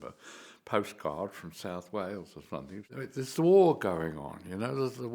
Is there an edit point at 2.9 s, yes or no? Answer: yes